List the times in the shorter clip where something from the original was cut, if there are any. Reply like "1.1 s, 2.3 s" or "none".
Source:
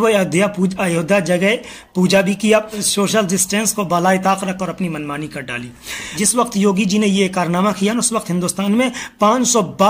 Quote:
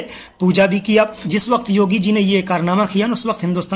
1.2 s